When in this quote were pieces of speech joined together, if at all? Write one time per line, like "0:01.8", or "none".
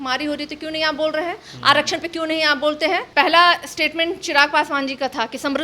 0:03.1